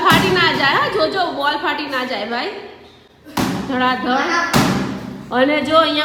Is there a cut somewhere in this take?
no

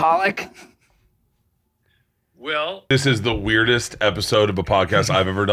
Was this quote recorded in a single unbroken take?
no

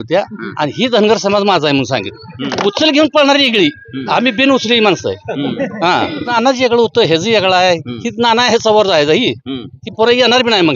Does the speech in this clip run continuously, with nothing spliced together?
no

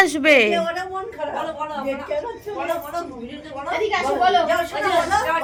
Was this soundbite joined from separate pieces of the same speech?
no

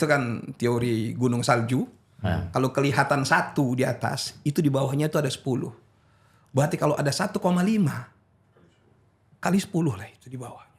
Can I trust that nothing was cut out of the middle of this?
yes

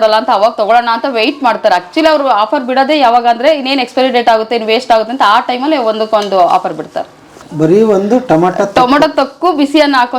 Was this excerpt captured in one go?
no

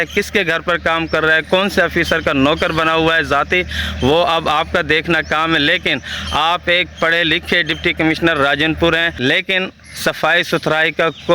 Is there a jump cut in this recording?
yes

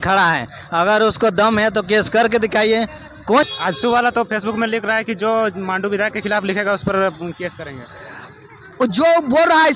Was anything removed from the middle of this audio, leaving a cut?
yes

